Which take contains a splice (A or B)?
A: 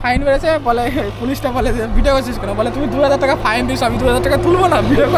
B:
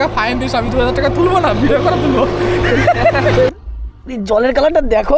B